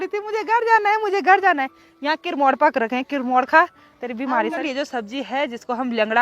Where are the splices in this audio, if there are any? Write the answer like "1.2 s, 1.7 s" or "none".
4.6 s